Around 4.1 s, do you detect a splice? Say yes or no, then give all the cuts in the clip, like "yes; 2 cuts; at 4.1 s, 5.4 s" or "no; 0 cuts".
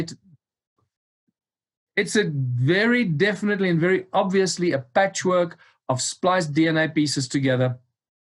no; 0 cuts